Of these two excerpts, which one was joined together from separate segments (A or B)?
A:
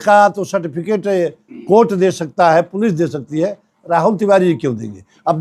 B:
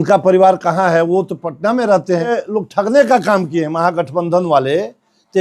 B